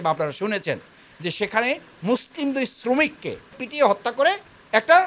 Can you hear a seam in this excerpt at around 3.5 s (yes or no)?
yes